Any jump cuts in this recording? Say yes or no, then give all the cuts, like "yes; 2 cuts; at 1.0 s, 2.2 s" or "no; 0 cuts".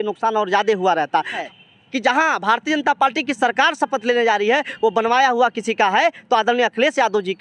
yes; 1 cut; at 1.4 s